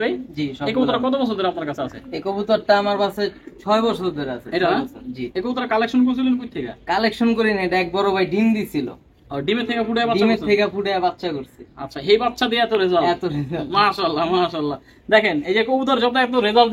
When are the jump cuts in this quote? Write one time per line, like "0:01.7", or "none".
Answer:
none